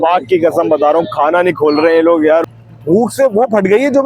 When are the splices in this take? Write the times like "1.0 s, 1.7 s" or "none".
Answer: 2.5 s